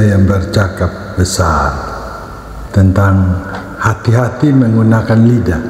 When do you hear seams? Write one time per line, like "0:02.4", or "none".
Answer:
0:02.0